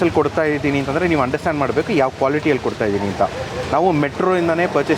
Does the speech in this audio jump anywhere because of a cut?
no; 0 cuts

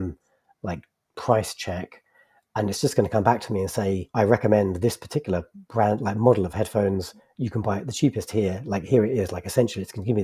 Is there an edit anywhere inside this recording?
yes; 1 cut; at 4.0 s

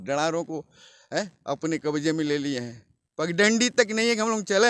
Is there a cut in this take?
no; 0 cuts

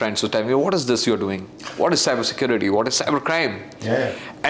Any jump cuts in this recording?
no; 0 cuts

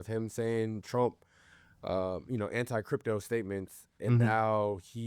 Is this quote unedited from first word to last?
yes; 0 cuts

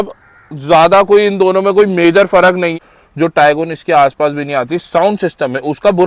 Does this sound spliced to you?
yes; 1 cut; at 2.7 s

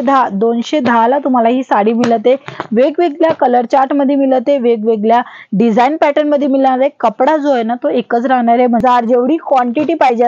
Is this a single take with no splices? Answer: no; 1 cut; at 8.8 s

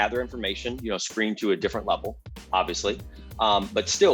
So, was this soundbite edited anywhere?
no; 0 cuts

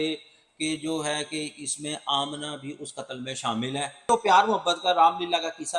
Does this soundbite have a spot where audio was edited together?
yes; 1 cut; at 4.0 s

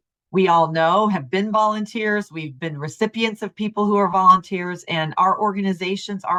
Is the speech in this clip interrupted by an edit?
no; 0 cuts

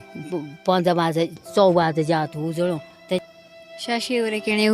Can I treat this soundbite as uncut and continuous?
no; 1 cut; at 3.2 s

